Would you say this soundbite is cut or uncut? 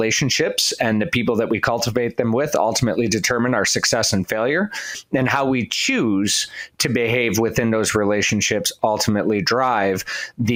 uncut